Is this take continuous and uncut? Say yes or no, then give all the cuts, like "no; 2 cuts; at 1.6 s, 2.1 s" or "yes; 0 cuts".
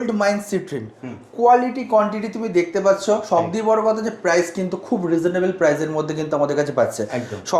yes; 0 cuts